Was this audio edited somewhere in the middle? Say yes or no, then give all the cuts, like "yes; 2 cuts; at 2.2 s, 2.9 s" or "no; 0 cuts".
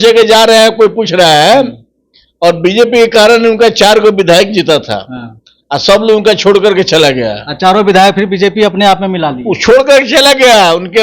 no; 0 cuts